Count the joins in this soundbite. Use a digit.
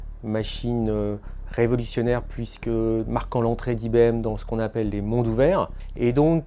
1